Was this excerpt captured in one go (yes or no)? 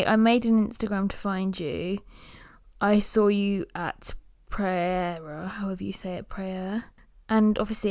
yes